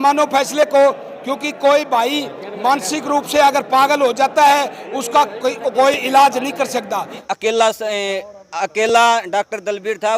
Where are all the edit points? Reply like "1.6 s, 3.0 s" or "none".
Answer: 7.2 s